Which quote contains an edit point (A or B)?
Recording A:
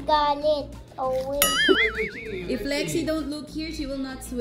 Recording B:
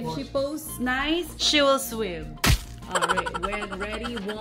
A